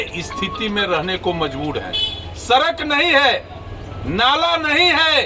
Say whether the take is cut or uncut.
uncut